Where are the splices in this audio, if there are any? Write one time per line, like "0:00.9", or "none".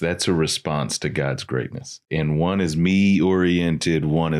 0:02.0